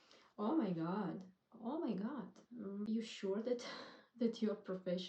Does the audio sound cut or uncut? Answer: cut